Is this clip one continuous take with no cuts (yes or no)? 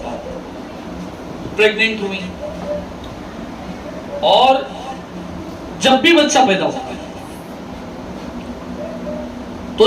yes